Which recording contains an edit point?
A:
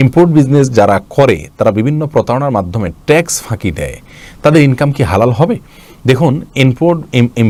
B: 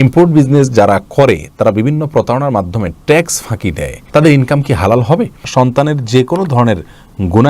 B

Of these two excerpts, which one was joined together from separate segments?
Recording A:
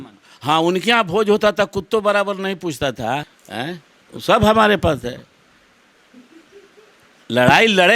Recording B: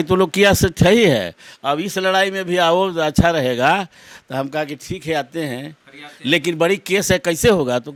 A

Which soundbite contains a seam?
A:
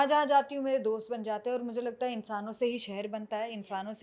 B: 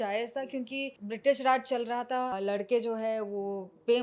B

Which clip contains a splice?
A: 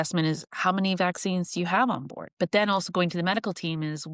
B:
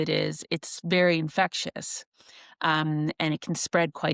A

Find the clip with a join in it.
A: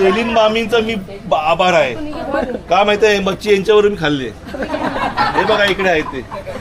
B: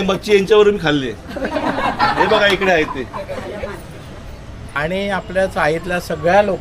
B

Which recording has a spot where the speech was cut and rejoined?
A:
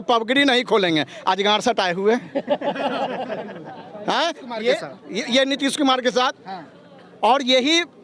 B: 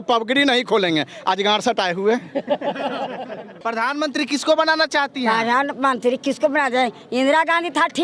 B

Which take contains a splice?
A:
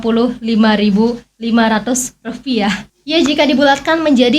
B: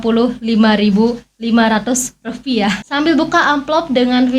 B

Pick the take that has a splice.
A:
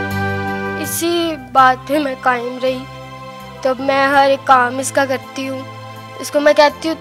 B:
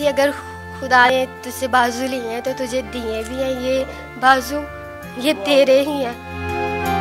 B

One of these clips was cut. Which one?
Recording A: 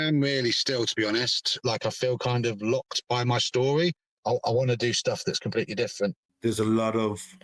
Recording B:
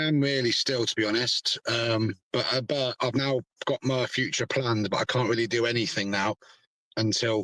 A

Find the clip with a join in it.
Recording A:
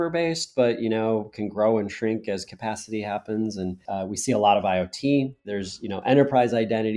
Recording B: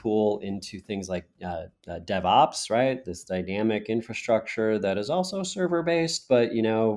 A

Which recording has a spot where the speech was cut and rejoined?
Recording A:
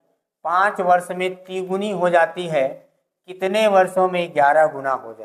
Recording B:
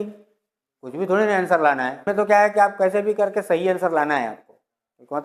B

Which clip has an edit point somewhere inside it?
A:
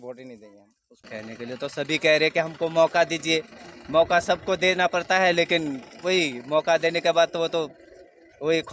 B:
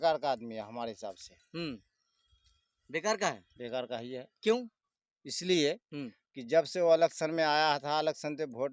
A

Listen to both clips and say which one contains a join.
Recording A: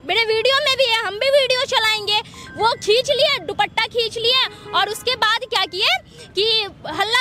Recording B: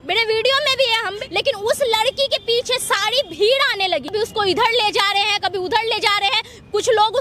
B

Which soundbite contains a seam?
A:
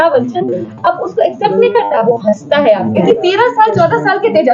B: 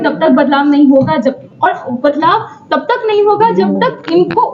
A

